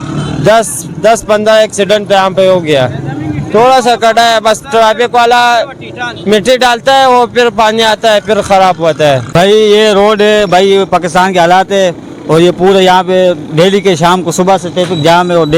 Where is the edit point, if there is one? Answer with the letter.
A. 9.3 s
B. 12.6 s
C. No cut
A